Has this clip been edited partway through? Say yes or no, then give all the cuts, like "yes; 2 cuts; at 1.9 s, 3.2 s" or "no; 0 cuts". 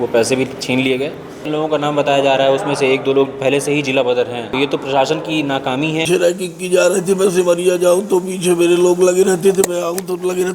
yes; 3 cuts; at 1.4 s, 4.5 s, 6.0 s